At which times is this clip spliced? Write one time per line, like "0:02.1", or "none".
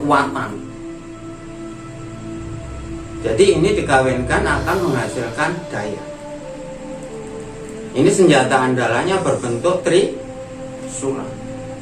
0:06.0
0:07.8